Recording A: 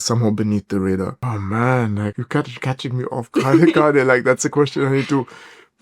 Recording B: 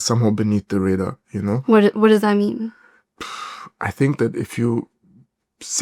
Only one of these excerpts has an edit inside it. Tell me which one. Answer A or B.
A